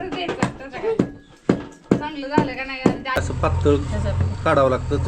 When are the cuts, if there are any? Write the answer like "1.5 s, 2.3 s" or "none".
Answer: 3.2 s